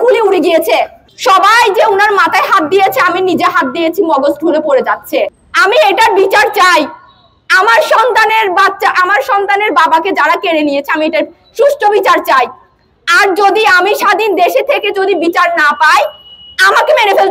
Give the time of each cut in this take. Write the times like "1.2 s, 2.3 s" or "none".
1.0 s, 5.4 s